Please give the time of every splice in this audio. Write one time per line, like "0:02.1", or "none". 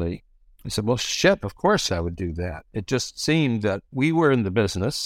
0:01.9
0:03.9